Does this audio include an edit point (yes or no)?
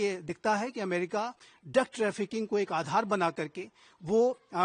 no